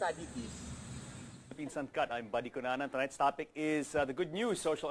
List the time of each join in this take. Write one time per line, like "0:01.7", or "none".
none